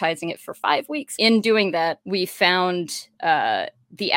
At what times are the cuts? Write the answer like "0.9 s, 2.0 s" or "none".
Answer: 1.1 s, 2.0 s